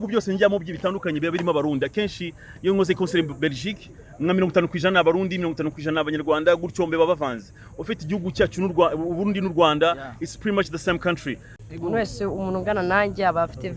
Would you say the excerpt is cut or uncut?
cut